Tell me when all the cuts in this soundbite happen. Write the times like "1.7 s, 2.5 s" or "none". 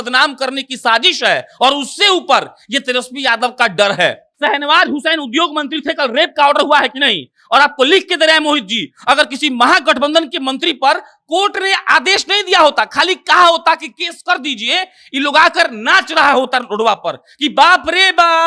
4.3 s